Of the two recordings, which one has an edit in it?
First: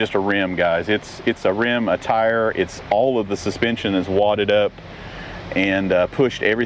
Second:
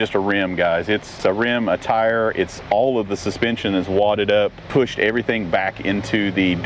second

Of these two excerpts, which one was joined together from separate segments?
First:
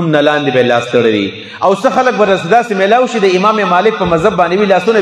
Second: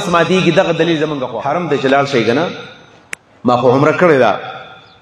second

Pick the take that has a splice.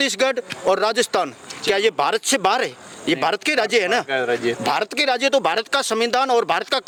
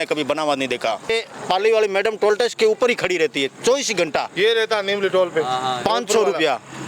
second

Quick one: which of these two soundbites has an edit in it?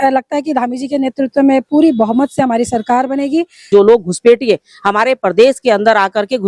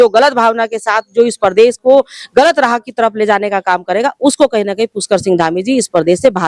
first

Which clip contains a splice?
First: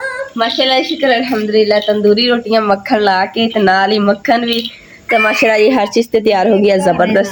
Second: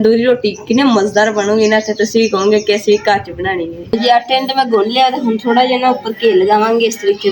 second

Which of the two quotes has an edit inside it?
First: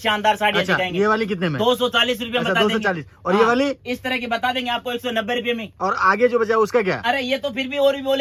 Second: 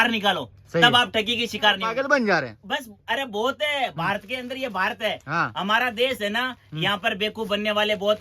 second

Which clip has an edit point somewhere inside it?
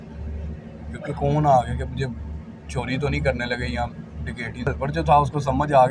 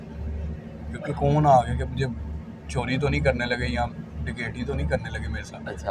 first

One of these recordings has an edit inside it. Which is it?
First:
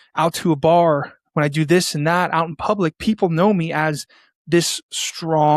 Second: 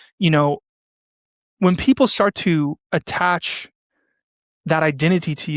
second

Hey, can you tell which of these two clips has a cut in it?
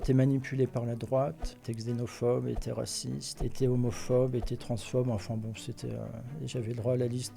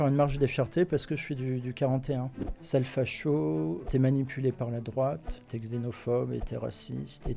second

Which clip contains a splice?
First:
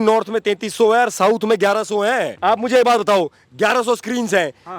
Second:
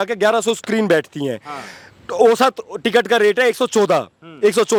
first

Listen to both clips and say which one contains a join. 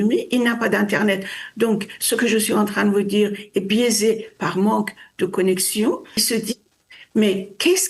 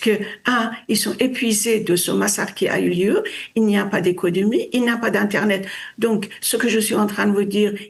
first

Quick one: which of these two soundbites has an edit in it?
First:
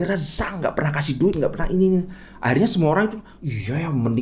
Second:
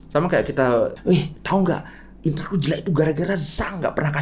second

